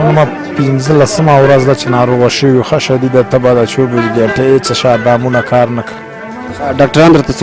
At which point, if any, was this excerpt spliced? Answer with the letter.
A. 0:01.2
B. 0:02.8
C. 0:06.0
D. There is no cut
D